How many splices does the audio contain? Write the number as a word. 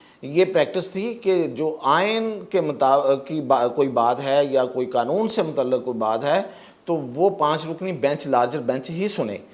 zero